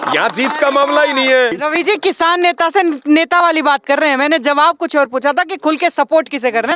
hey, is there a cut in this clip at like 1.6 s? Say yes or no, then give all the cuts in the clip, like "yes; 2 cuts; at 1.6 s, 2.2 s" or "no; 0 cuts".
yes; 1 cut; at 1.6 s